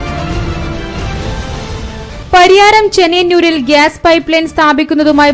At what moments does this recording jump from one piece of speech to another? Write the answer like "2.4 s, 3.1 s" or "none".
2.2 s